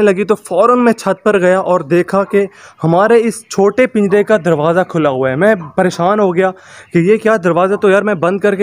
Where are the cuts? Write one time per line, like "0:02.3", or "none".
none